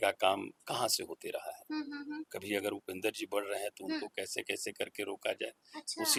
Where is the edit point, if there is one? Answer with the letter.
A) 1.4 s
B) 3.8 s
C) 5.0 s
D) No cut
D